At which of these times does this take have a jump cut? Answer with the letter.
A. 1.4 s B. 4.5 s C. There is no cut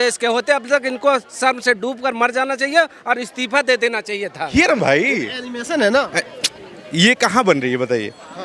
B